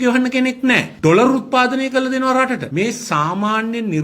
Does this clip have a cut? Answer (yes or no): yes